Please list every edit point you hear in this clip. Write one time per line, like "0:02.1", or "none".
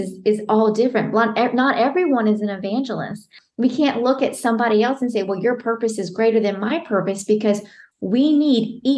0:03.4